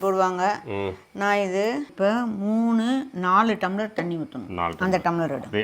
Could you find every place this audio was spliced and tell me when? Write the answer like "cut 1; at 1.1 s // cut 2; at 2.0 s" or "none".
cut 1; at 1.9 s